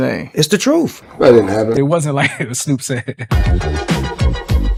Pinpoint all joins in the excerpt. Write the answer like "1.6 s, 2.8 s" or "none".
none